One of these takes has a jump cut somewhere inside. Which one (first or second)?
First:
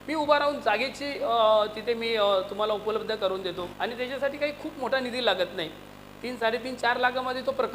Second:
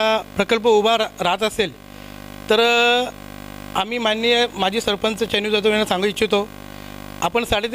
first